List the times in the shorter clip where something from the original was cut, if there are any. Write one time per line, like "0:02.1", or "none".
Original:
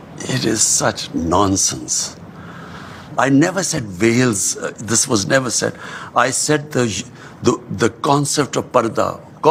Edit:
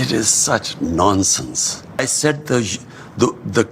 0:02.0